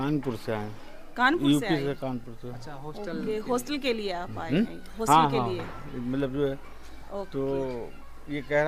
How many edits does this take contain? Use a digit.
0